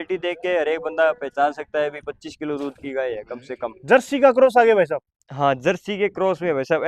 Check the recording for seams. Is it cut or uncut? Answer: cut